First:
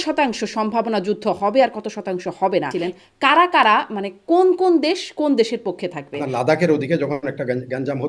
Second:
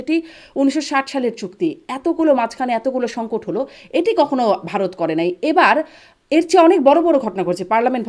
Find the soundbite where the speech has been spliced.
first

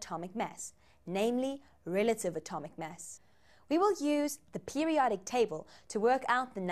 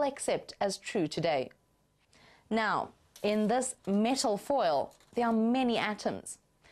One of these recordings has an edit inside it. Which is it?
second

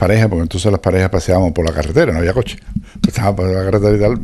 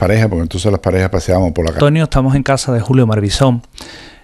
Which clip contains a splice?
first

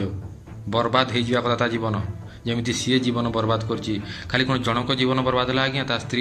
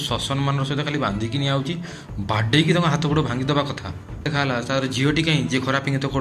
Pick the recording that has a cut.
second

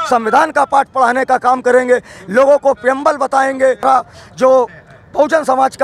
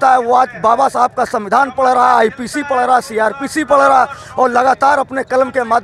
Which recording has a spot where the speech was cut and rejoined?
first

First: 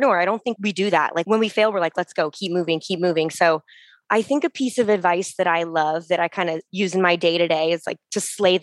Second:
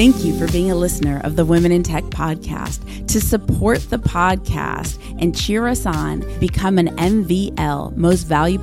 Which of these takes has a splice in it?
first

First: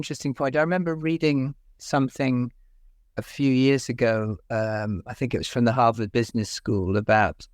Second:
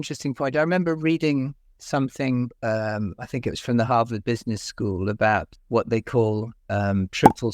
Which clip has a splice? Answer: second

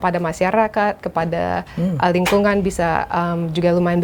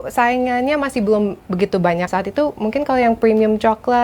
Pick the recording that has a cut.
second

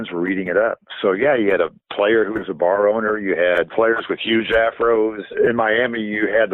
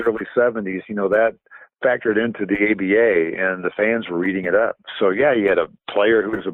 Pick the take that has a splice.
first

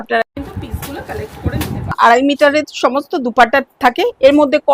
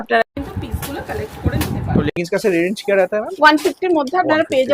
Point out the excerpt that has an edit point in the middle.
first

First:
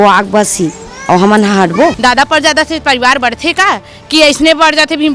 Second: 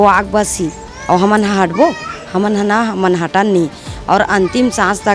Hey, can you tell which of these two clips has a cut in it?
first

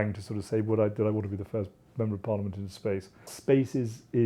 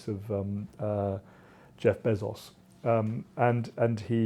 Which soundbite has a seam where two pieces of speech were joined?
first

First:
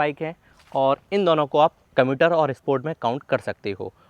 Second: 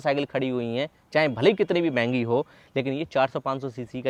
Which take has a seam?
first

